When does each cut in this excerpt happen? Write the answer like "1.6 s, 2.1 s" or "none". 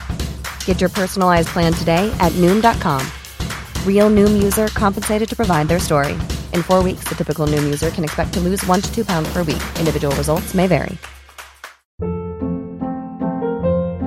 11.6 s